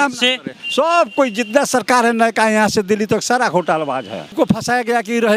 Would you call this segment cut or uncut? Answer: cut